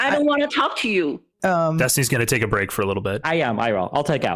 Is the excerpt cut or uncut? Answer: cut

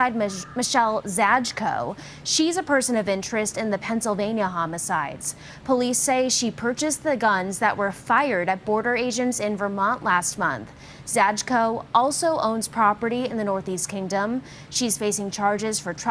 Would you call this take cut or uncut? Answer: cut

